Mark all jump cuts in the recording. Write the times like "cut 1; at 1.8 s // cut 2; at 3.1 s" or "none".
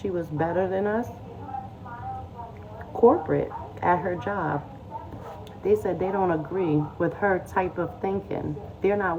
none